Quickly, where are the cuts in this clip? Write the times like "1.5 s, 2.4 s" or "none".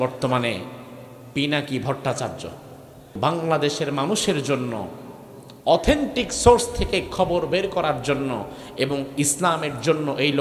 3.2 s